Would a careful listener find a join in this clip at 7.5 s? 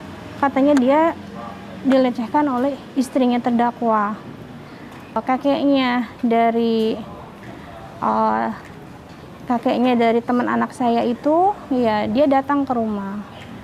no; 1 cut; at 5.2 s

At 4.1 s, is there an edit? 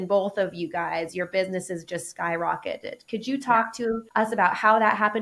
yes; 1 cut; at 4.1 s

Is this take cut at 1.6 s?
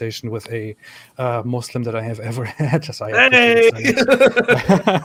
no; 0 cuts

